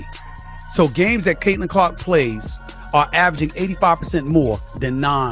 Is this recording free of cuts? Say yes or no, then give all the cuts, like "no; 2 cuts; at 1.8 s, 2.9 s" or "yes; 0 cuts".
yes; 0 cuts